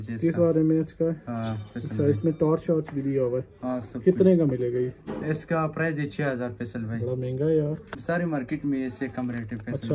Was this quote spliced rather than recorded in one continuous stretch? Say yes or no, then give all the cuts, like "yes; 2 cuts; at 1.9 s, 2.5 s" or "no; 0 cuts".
no; 0 cuts